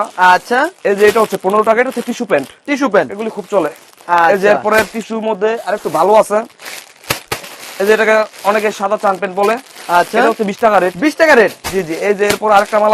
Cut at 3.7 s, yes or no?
no